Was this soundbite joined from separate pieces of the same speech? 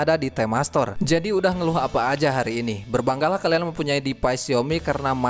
yes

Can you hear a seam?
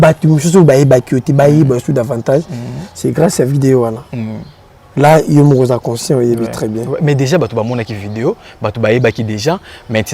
no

